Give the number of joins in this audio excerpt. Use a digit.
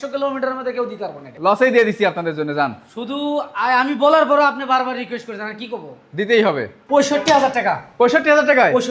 2